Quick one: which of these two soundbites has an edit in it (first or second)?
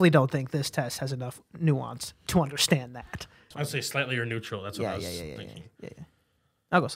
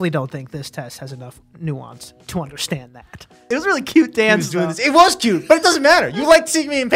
second